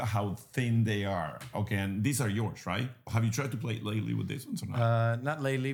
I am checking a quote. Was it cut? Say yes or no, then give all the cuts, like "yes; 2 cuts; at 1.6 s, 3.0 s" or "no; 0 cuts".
yes; 1 cut; at 3.1 s